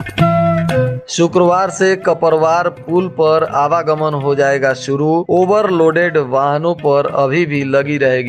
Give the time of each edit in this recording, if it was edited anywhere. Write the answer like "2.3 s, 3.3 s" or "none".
1.0 s